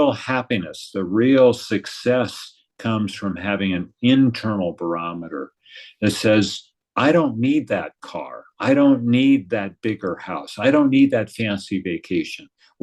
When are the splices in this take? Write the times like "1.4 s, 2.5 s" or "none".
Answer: none